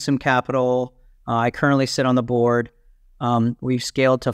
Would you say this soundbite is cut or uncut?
uncut